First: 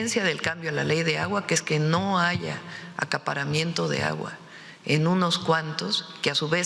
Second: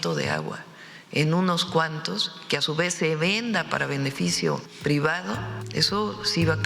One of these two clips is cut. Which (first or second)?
second